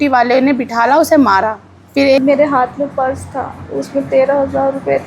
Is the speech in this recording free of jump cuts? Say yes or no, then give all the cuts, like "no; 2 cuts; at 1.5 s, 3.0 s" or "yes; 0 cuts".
no; 1 cut; at 2.2 s